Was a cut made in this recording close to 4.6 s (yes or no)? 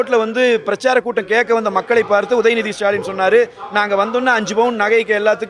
no